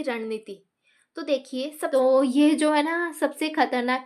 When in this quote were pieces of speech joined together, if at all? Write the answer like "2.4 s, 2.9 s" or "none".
1.8 s